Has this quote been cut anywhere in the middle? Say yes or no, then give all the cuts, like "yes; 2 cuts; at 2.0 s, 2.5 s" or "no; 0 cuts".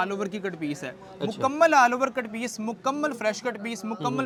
no; 0 cuts